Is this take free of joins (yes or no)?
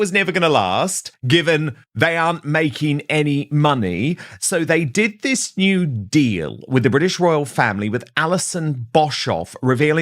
no